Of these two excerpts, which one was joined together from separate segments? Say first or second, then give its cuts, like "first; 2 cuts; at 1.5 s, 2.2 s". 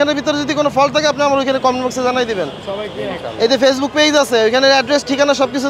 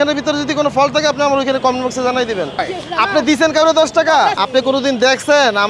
second; 2 cuts; at 2.6 s, 4.4 s